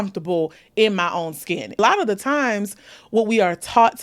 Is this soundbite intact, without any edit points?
no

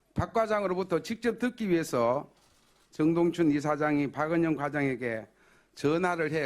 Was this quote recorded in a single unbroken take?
no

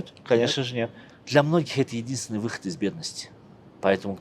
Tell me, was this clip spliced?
yes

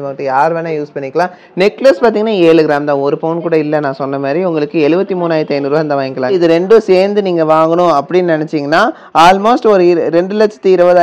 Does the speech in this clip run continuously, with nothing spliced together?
no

